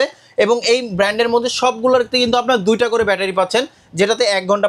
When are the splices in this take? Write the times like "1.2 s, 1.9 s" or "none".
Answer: none